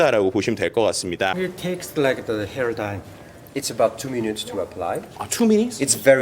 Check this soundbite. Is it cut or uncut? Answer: cut